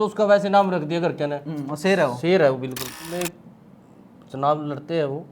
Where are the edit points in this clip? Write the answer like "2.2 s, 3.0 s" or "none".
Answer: 3.1 s